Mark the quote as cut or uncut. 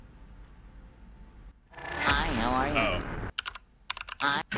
cut